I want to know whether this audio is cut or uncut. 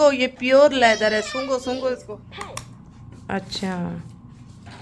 cut